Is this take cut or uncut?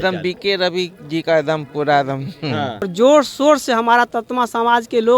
cut